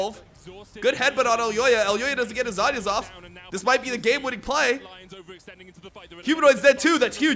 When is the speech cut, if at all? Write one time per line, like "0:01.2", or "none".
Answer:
none